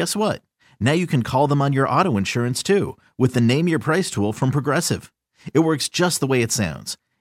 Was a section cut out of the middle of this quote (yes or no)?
no